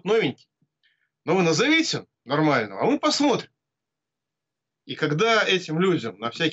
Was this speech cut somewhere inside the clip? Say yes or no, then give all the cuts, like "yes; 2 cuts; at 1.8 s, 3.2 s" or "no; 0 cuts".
no; 0 cuts